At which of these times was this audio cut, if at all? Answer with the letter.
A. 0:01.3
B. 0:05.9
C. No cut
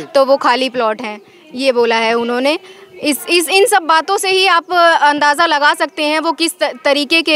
C